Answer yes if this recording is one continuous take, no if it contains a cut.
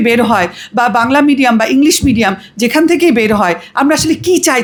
yes